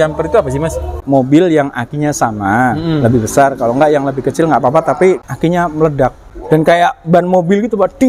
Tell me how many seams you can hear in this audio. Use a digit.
3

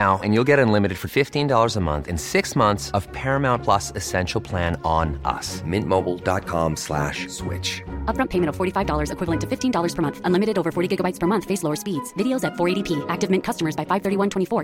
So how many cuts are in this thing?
0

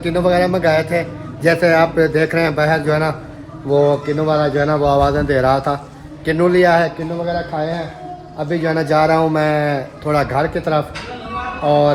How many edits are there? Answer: 0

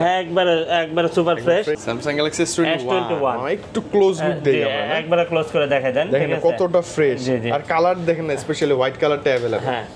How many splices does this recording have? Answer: 1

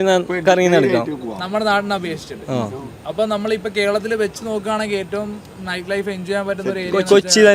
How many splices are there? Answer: 0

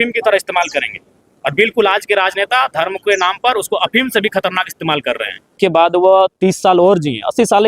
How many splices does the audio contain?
1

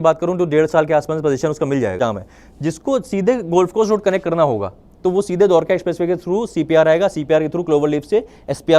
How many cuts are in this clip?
1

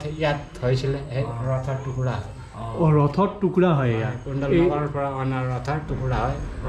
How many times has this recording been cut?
0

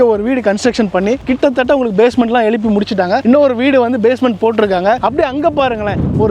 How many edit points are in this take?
1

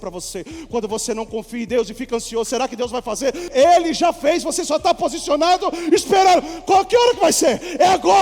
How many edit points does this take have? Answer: 1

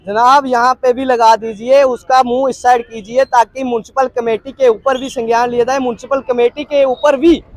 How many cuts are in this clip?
0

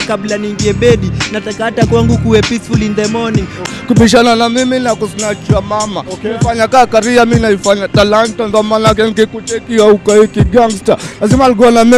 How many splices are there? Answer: 1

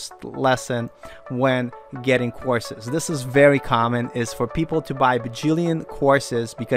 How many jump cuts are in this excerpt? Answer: 0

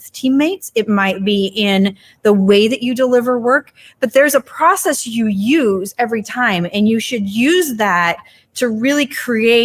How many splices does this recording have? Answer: 0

